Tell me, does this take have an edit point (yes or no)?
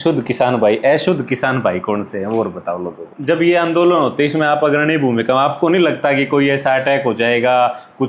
yes